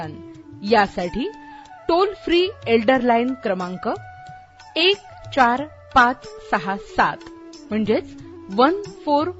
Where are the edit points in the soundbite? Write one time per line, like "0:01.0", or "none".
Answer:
none